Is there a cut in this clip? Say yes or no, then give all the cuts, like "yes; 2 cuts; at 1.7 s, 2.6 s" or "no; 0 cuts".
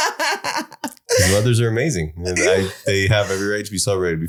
no; 0 cuts